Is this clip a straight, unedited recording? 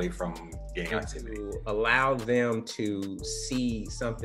no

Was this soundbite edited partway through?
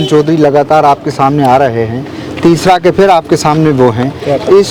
no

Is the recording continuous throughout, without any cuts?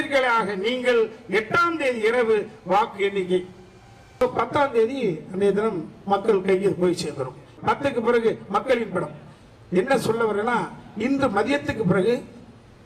no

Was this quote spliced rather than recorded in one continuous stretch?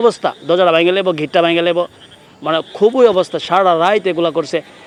no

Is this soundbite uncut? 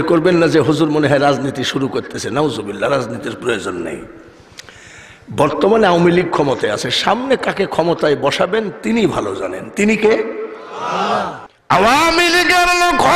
no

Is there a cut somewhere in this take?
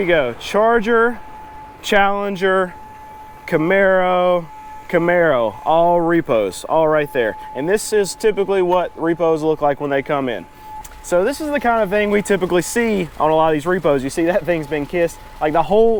no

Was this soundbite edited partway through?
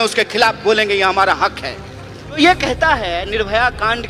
no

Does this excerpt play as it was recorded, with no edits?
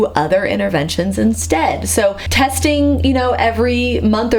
no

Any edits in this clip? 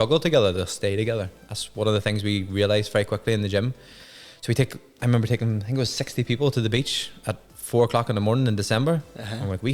no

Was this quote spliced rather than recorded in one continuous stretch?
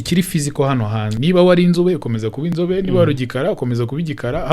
yes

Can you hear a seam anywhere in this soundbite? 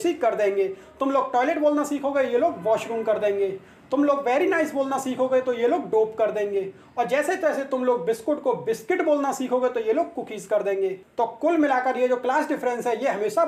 no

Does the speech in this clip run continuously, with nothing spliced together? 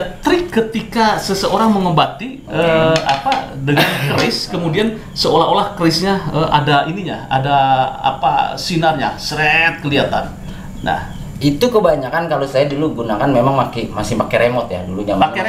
yes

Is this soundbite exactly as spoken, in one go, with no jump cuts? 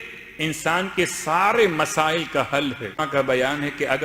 no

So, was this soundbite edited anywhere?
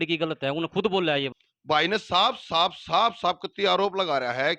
yes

